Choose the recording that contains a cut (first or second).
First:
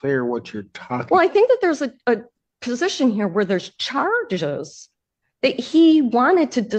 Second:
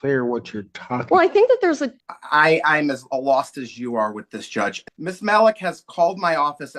second